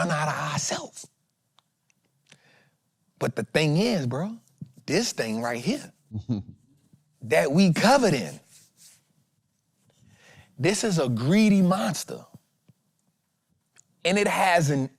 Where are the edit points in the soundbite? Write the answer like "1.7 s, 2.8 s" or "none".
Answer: 13.6 s